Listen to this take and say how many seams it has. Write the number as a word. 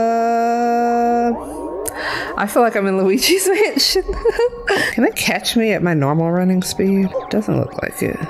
two